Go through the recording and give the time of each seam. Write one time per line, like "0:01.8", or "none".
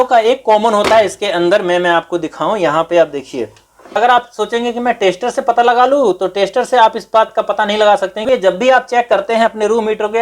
0:04.0
0:08.2